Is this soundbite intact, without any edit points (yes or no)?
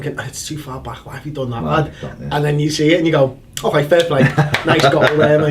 no